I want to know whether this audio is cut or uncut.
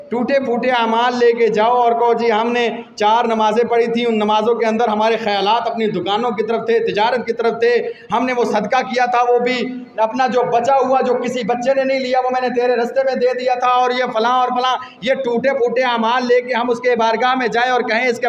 uncut